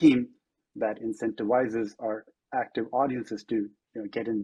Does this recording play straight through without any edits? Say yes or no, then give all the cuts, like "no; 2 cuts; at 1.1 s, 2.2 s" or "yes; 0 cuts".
yes; 0 cuts